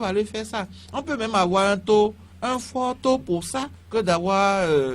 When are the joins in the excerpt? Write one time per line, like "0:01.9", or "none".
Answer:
none